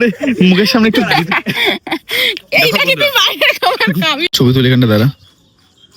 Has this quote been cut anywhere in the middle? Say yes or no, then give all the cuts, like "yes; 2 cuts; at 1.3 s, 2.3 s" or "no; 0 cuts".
yes; 1 cut; at 4.3 s